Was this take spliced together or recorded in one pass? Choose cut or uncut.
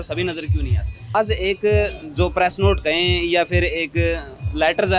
cut